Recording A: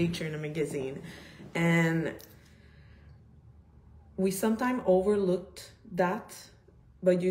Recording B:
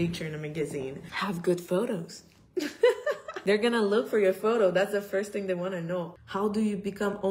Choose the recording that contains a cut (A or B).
B